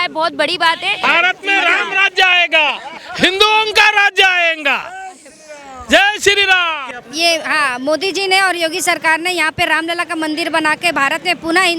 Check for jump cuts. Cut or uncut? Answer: cut